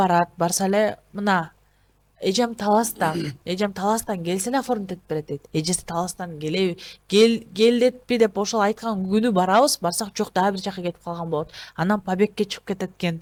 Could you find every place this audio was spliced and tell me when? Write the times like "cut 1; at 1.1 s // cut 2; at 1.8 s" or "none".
none